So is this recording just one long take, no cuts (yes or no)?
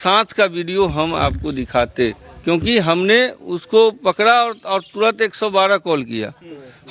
yes